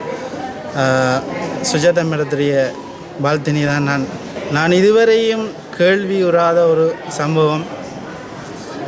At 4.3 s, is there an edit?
yes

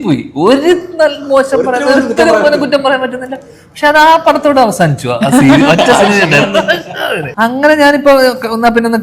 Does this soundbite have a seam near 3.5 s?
no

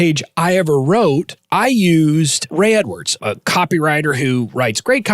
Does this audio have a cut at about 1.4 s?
yes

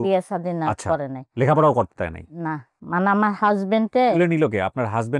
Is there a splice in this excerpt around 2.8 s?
yes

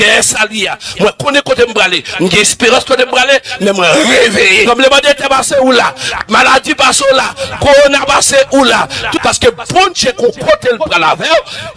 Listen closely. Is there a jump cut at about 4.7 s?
yes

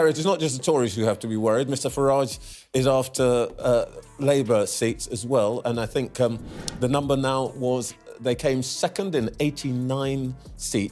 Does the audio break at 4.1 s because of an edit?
no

